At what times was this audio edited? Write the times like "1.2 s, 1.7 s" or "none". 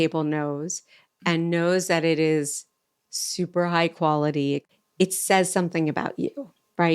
4.7 s

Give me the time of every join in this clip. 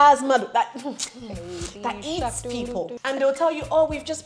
3.0 s

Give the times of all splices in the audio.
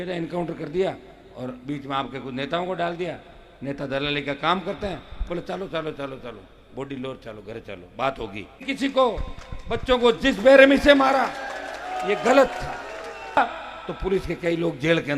8.6 s, 13.4 s

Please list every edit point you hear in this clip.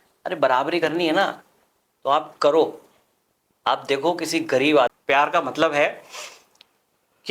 5.0 s

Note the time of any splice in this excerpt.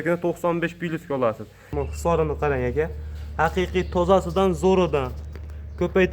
1.7 s

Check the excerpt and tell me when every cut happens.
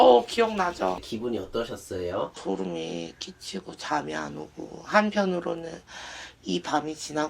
1.0 s, 2.4 s

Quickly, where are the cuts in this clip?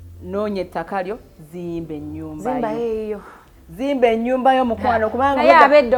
none

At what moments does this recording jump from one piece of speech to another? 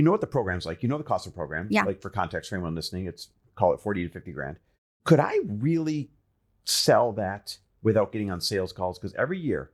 none

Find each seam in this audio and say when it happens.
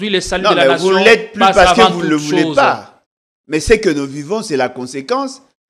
none

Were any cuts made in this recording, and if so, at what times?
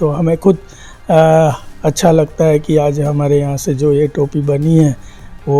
none

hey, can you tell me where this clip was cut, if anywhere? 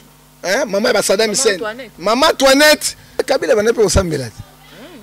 3.2 s

